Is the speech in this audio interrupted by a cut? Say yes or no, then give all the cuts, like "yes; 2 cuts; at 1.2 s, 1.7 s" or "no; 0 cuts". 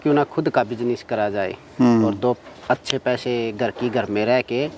no; 0 cuts